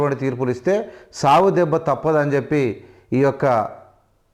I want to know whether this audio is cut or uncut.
uncut